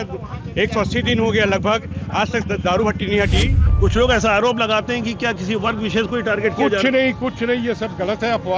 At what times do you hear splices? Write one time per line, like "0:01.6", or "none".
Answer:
0:03.6